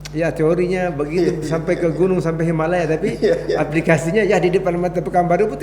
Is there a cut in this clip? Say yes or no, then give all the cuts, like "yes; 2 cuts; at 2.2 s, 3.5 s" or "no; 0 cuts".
no; 0 cuts